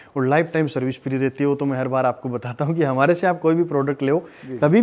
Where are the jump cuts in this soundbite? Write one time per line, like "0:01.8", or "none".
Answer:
none